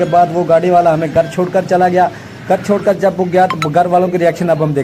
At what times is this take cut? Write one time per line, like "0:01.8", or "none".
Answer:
none